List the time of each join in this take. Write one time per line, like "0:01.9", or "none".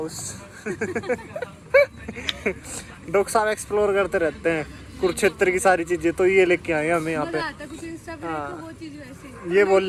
none